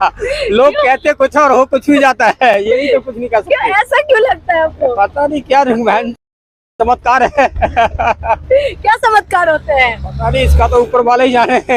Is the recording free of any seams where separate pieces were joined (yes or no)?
yes